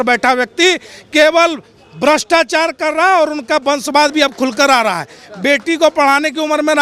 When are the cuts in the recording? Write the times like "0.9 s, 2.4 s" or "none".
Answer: none